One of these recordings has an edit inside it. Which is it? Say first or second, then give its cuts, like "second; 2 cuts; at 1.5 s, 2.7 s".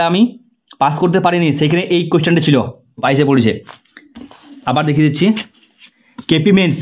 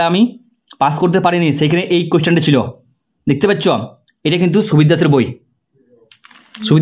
first; 1 cut; at 3.0 s